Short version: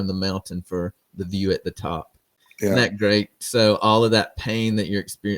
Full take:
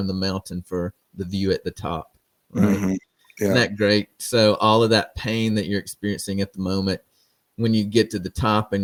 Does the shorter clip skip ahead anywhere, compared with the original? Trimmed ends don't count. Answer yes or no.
yes